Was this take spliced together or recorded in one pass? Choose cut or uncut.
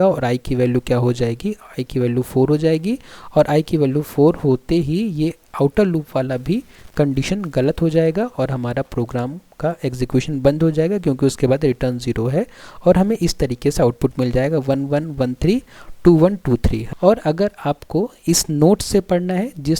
cut